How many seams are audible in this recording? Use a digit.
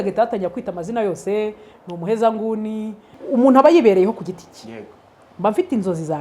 1